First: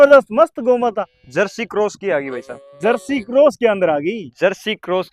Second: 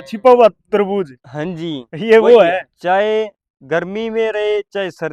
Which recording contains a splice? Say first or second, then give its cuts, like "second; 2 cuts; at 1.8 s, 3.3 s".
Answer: second; 1 cut; at 2.7 s